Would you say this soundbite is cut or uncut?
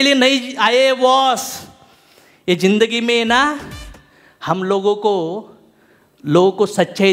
uncut